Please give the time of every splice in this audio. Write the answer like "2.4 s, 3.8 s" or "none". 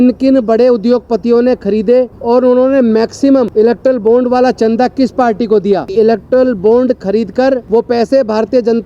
2.2 s, 3.5 s, 5.9 s, 7.6 s